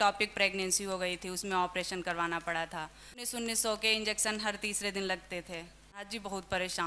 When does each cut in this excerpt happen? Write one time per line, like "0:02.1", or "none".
0:03.3
0:06.1